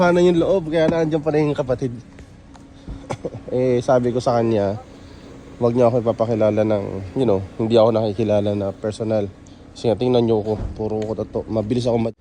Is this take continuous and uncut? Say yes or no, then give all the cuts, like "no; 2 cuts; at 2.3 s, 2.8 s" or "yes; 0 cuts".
yes; 0 cuts